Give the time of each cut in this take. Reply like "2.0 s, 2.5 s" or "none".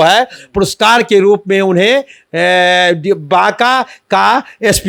none